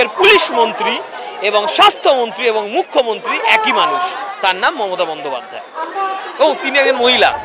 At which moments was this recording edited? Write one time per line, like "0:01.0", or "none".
none